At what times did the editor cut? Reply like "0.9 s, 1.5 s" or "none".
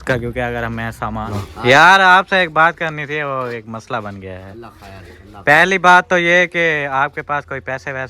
1.3 s